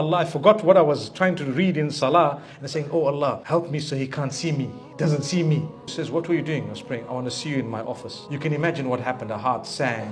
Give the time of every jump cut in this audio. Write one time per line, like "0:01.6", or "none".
0:03.4
0:06.0
0:08.1